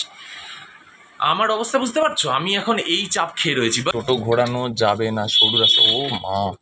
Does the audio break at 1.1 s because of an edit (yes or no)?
no